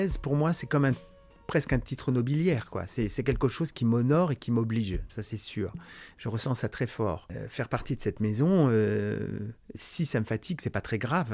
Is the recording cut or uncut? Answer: cut